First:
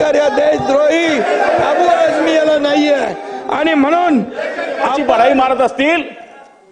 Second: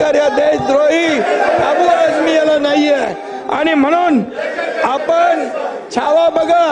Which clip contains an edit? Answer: first; 1 cut; at 5.0 s

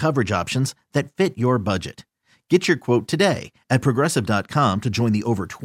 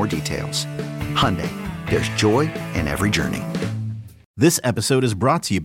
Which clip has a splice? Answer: second; 1 cut; at 4.2 s

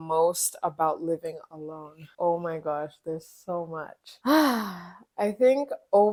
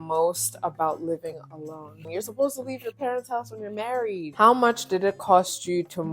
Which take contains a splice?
second; 2 cuts; at 2.1 s, 4.3 s

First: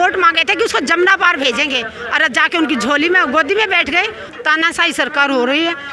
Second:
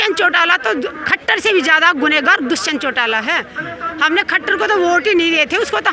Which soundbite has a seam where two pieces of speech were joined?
first; 1 cut; at 4.2 s

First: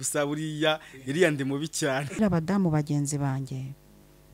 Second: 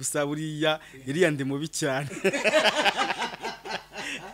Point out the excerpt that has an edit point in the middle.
first; 1 cut; at 2.2 s

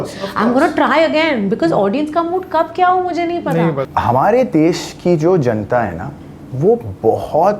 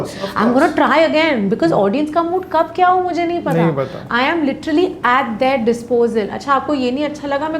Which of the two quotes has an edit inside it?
first; 1 cut; at 3.9 s

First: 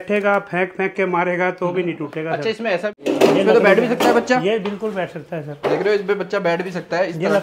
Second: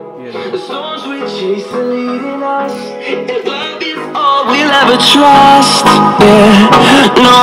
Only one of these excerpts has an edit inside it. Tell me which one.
first; 1 cut; at 3.0 s

